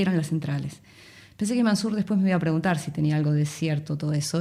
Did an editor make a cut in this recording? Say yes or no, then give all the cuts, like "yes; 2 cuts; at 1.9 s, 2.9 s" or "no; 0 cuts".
no; 0 cuts